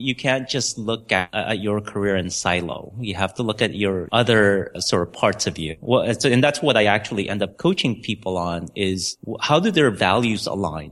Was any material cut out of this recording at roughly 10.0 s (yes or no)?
no